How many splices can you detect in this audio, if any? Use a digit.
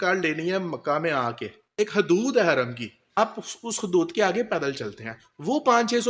2